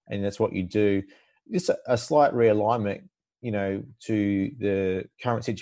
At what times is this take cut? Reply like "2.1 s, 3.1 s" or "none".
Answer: none

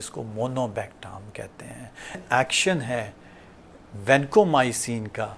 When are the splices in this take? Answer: 2.2 s

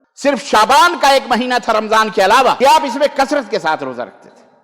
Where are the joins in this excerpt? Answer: 2.6 s

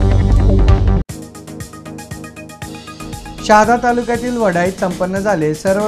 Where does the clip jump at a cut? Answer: 1.0 s, 3.1 s

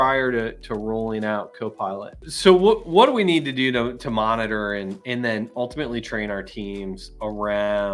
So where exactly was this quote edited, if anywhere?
none

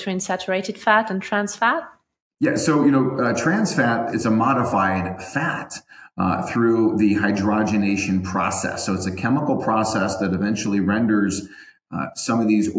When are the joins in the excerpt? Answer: 4.1 s

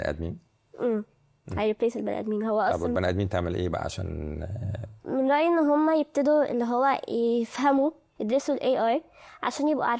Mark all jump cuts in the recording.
8.1 s

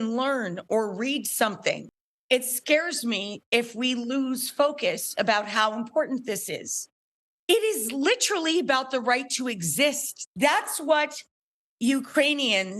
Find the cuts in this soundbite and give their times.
1.9 s, 10.1 s

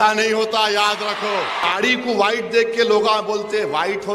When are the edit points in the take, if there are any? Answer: 1.6 s

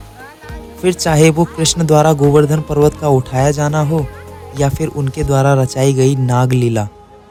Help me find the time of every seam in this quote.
none

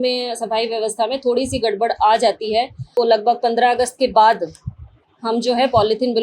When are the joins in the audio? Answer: 2.9 s

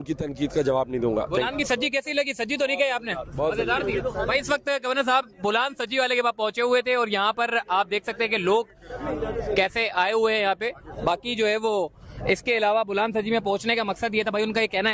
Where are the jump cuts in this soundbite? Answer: none

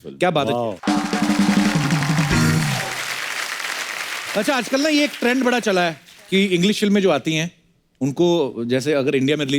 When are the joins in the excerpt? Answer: 4.2 s

